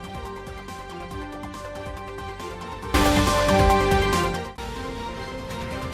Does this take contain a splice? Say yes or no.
yes